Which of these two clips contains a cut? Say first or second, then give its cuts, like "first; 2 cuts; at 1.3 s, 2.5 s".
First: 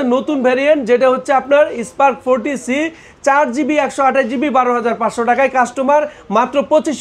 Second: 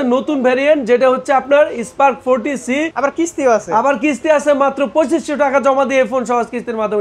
second; 1 cut; at 2.9 s